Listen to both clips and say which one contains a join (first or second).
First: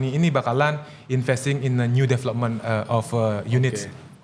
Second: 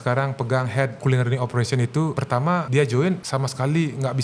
second